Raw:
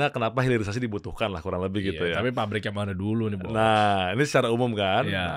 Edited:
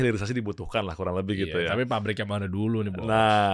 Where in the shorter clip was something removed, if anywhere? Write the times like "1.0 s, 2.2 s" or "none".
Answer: none